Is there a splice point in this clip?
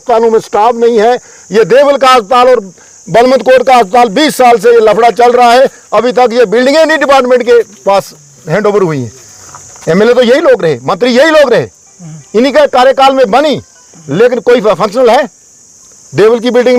no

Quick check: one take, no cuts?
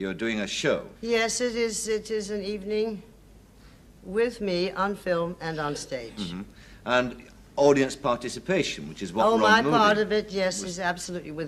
no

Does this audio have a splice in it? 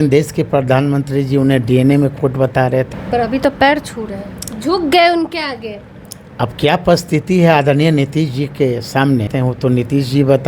yes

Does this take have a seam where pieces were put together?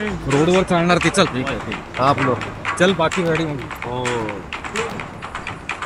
yes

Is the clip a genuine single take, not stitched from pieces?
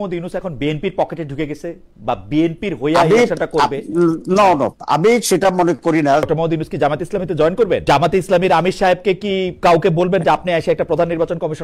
no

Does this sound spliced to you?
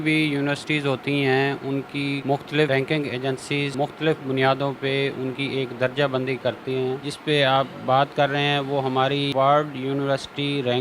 yes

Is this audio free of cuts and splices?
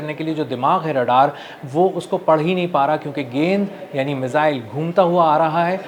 yes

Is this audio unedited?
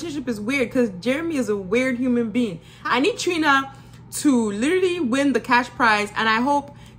no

